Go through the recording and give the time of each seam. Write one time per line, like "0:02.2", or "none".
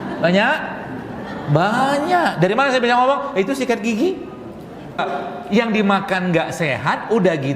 0:05.0